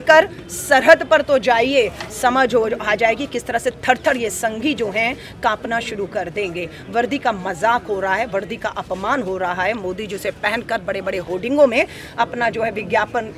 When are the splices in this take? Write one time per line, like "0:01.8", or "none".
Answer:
none